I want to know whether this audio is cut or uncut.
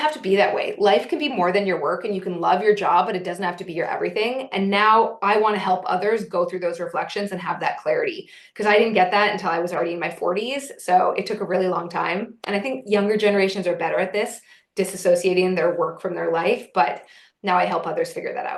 uncut